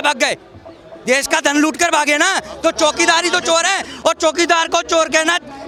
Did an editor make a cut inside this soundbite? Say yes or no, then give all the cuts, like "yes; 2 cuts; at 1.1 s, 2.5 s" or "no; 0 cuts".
no; 0 cuts